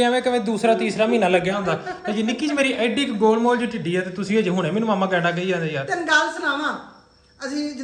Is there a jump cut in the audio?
no; 0 cuts

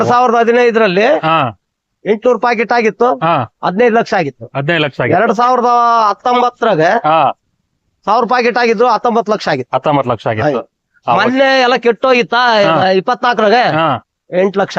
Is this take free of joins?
yes; 0 cuts

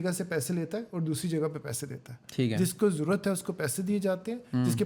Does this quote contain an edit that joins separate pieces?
no; 0 cuts

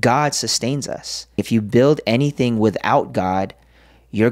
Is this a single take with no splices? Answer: no; 1 cut; at 1.4 s

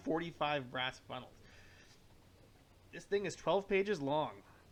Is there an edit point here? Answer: no; 0 cuts

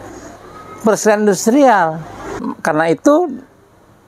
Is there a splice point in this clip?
yes; 1 cut; at 2.5 s

